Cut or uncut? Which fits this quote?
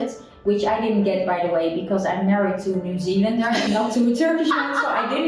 uncut